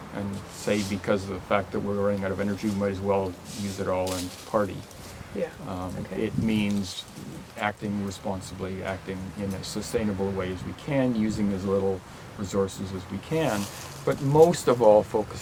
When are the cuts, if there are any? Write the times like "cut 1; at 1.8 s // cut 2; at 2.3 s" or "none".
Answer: none